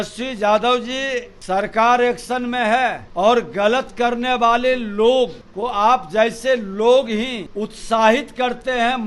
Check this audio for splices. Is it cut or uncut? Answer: cut